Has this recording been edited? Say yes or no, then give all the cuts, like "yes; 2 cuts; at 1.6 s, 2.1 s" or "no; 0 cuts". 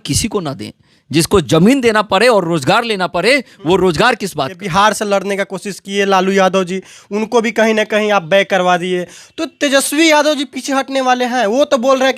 yes; 1 cut; at 4.6 s